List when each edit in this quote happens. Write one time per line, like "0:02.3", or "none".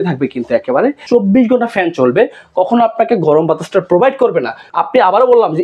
0:01.0
0:04.6